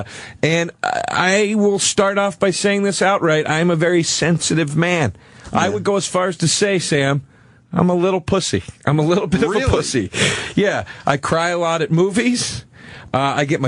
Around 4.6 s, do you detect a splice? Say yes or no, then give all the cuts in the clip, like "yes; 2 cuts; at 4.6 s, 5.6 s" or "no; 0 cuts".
yes; 1 cut; at 4.6 s